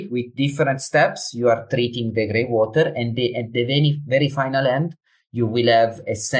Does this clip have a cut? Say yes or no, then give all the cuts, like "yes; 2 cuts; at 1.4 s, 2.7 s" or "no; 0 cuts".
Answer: no; 0 cuts